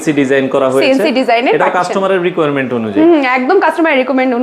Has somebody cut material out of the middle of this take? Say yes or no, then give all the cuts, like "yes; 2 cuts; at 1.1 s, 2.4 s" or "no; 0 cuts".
no; 0 cuts